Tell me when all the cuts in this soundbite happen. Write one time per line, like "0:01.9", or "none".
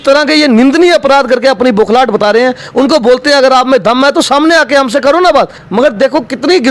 0:05.6